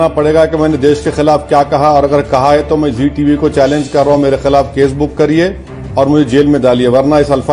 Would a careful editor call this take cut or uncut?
uncut